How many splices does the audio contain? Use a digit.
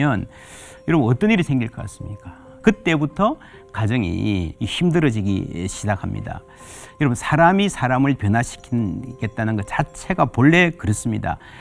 2